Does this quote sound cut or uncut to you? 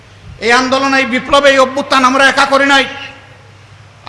uncut